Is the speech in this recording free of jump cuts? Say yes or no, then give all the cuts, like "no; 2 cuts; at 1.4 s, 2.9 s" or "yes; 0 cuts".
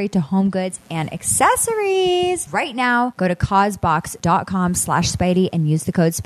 no; 2 cuts; at 3.1 s, 4.1 s